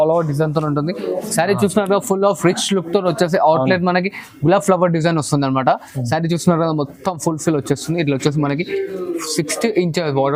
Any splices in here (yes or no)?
no